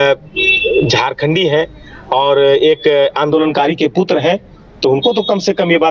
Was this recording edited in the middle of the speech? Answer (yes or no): no